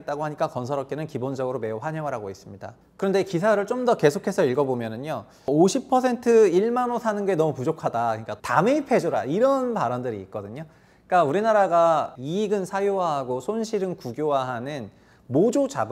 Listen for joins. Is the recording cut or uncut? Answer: cut